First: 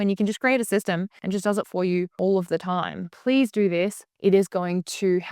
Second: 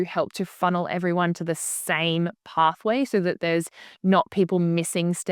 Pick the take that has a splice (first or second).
first